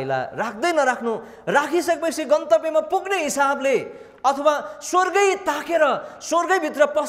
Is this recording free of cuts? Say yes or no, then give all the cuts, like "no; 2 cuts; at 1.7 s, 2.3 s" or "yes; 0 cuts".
yes; 0 cuts